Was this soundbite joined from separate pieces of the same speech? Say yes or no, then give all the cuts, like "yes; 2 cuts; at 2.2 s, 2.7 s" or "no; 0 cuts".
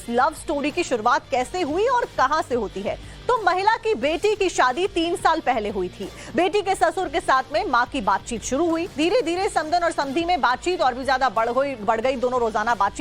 yes; 1 cut; at 1.0 s